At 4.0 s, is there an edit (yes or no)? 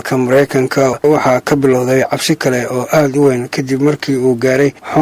no